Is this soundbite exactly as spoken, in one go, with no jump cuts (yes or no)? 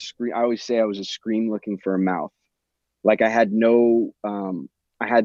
yes